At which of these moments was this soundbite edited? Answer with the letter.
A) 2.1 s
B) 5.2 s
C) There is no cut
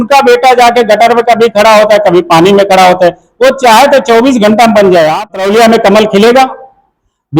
B